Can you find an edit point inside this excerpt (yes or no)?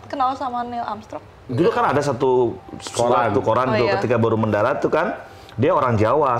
no